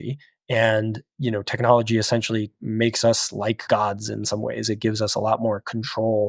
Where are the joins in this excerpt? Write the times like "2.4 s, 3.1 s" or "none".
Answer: none